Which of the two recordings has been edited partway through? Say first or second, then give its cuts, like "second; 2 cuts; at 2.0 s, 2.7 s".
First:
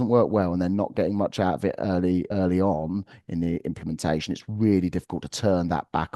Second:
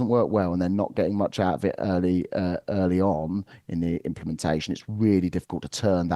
first; 1 cut; at 2.3 s